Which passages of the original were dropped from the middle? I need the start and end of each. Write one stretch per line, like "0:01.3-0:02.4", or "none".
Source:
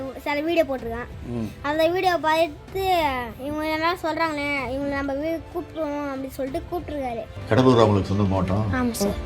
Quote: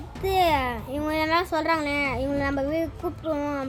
none